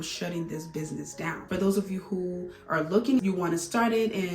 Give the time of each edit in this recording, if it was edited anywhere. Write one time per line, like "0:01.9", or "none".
0:01.4
0:03.2

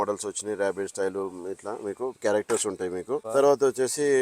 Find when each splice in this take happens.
0:03.2

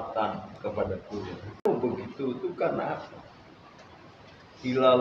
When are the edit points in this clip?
0:01.7

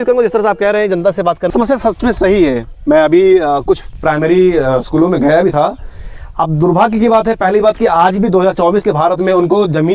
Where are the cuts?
0:01.5

